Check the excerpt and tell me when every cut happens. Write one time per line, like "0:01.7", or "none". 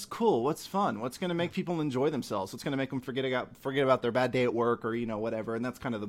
none

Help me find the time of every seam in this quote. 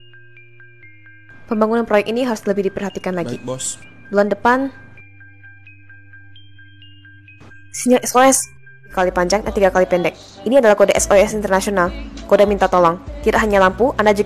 0:08.9

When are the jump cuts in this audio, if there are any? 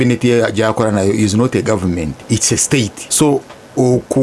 0:02.2
0:03.0

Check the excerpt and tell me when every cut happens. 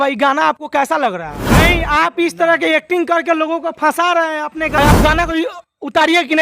0:01.5
0:04.8

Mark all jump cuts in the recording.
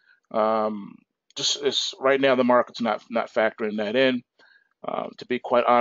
0:03.4

